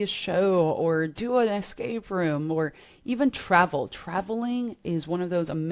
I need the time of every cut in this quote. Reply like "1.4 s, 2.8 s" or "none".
none